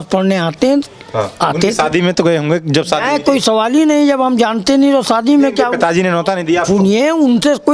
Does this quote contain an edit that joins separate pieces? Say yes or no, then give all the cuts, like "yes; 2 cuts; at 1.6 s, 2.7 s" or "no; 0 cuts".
no; 0 cuts